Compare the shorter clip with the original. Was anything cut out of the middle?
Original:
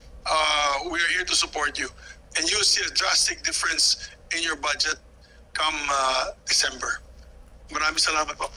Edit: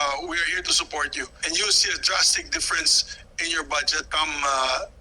yes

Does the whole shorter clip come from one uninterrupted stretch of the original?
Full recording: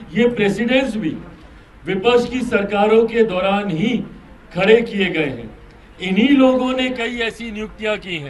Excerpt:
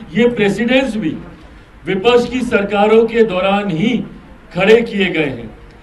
yes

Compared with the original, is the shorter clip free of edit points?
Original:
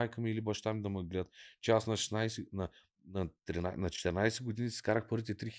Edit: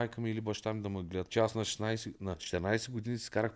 no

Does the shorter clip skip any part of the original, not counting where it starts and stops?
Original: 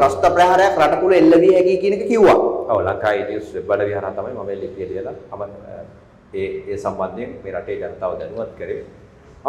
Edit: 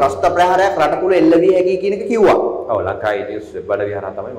no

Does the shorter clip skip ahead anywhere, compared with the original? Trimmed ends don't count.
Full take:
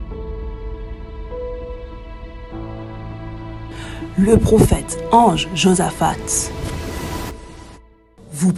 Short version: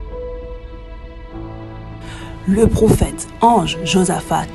yes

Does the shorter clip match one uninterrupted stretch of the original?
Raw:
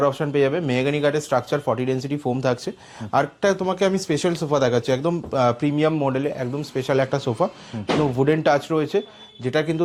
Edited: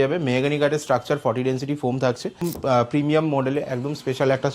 no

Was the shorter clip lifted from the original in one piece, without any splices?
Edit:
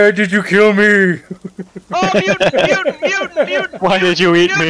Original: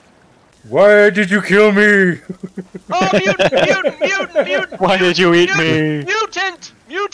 yes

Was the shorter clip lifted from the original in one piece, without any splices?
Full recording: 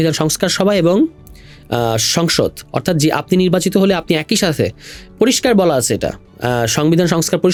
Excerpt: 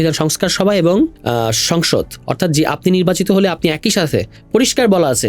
no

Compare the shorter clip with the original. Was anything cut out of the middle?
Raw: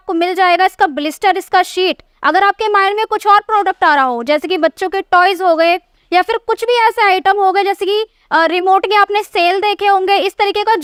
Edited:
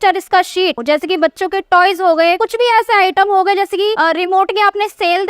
yes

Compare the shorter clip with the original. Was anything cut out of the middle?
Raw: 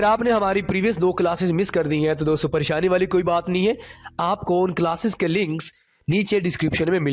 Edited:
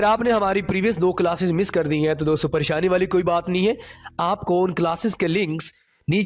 no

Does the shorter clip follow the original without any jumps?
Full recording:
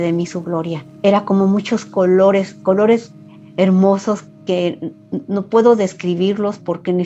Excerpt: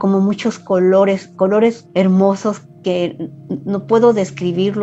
no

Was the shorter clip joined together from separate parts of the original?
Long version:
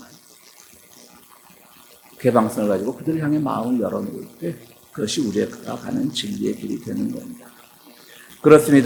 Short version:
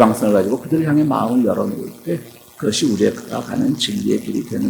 no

